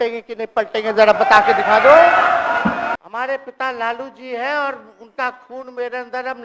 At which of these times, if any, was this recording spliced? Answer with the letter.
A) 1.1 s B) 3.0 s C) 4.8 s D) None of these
B